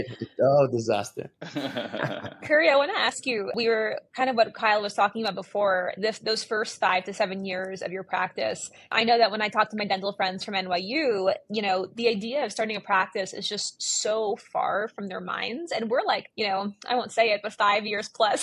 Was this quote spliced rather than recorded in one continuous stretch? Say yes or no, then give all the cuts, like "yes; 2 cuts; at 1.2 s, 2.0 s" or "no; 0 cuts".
no; 0 cuts